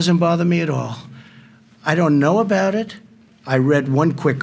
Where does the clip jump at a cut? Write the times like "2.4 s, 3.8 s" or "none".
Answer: none